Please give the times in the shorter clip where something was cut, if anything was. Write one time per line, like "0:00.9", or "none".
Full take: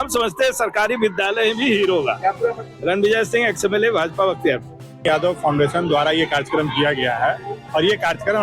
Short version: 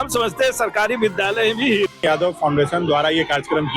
0:01.9